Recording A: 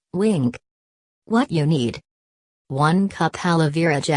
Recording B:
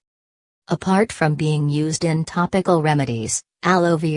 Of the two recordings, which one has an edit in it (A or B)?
B